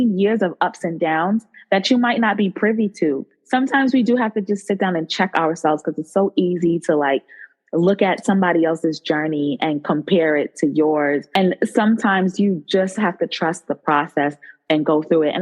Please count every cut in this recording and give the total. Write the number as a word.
two